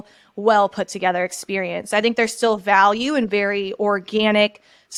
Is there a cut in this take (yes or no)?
no